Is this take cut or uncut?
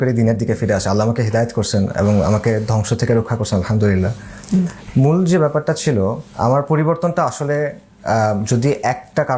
uncut